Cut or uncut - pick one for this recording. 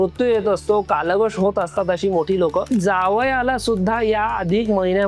cut